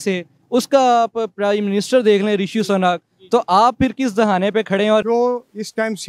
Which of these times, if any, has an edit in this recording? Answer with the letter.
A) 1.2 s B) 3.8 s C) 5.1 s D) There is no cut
C